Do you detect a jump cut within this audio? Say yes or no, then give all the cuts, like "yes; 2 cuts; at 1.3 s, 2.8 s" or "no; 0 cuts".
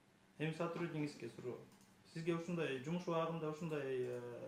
no; 0 cuts